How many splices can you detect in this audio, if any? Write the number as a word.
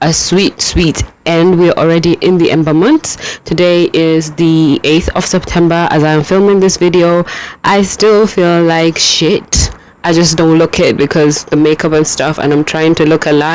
zero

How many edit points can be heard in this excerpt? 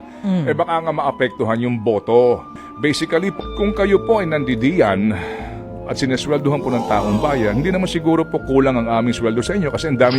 one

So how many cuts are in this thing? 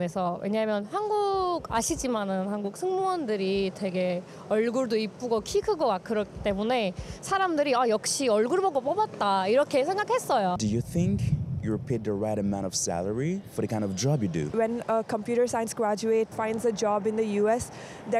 three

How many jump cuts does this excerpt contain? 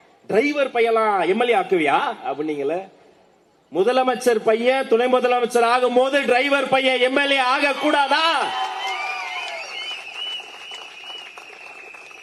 zero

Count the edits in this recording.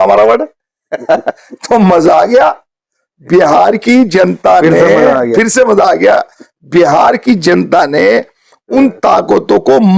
zero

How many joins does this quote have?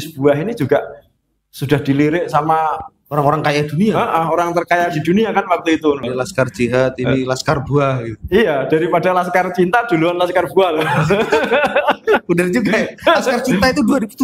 one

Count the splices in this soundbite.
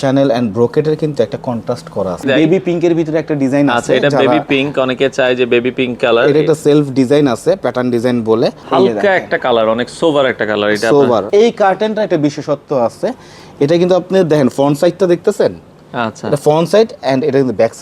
three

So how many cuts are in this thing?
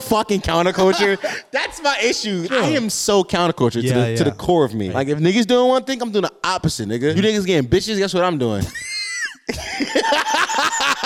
three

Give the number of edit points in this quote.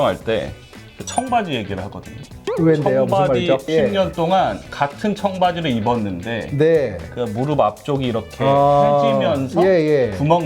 one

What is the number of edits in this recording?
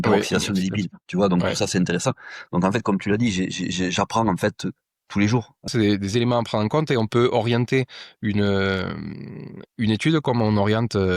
one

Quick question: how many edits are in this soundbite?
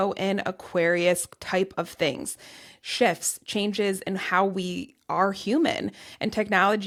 zero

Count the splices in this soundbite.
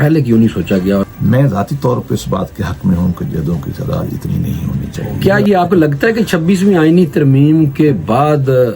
two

